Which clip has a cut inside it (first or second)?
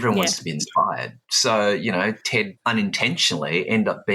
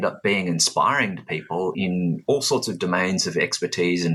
first